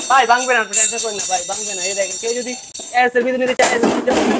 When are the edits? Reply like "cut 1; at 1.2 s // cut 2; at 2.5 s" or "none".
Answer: none